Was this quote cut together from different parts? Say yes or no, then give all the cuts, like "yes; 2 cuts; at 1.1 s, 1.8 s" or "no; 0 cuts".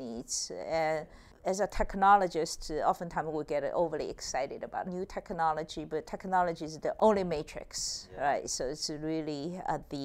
yes; 3 cuts; at 1.3 s, 4.9 s, 7.0 s